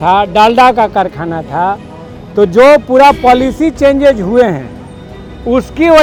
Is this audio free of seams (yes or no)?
yes